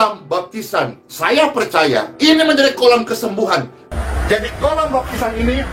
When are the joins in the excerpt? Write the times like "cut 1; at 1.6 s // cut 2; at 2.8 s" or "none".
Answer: cut 1; at 3.8 s

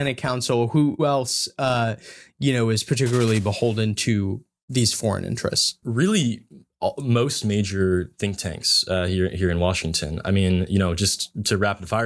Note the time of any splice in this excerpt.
cut 1; at 1.0 s // cut 2; at 5.8 s

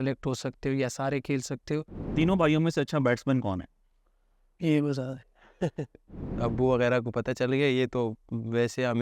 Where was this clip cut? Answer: cut 1; at 2.1 s // cut 2; at 6.3 s

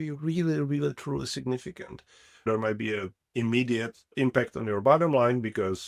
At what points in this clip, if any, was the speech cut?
cut 1; at 2.5 s // cut 2; at 4.0 s

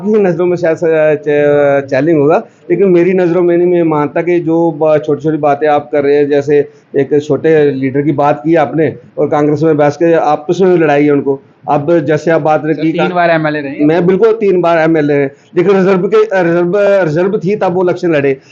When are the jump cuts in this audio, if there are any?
none

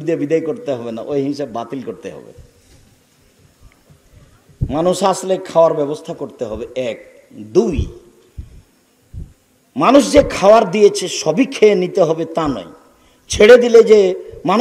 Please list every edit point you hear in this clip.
none

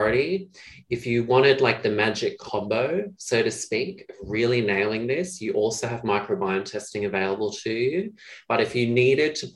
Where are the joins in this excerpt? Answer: cut 1; at 2.4 s

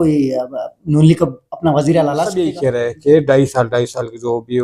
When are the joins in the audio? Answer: cut 1; at 2.5 s

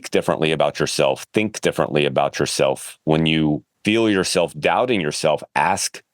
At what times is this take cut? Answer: cut 1; at 3.7 s

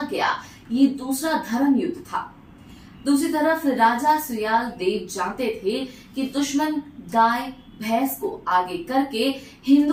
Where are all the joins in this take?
none

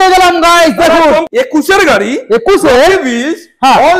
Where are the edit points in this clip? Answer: cut 1; at 1.3 s

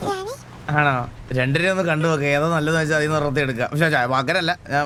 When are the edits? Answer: none

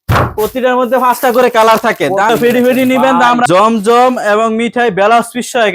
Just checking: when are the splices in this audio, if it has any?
cut 1; at 2.3 s // cut 2; at 3.5 s

